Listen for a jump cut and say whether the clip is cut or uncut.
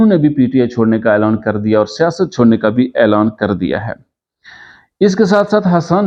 uncut